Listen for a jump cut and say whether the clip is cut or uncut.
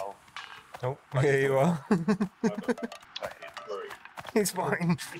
cut